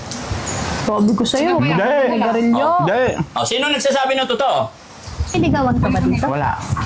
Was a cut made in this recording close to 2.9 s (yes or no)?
no